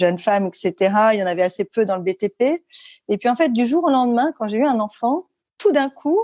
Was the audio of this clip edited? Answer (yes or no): no